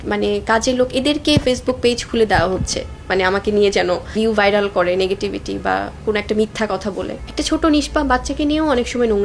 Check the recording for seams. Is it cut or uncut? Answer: cut